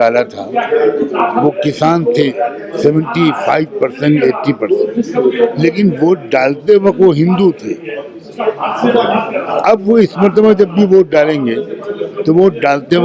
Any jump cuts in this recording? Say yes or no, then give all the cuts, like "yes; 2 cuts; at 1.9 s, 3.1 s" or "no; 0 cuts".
no; 0 cuts